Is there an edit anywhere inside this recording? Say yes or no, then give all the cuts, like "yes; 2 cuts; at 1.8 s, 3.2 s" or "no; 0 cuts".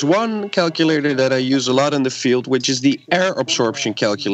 no; 0 cuts